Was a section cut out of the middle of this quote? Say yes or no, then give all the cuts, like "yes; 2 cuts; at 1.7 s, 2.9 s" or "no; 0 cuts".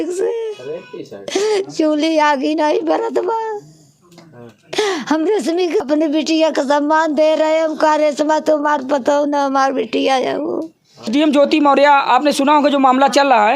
yes; 2 cuts; at 5.8 s, 11.1 s